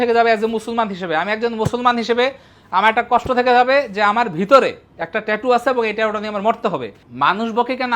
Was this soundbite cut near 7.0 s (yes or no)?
yes